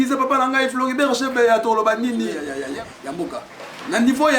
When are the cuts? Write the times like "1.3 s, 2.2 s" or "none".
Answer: 2.4 s